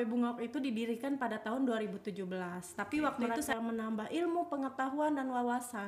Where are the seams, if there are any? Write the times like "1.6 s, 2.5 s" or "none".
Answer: 3.3 s